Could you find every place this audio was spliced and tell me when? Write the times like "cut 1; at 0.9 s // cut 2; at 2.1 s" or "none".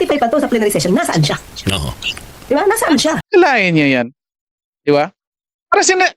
cut 1; at 3.2 s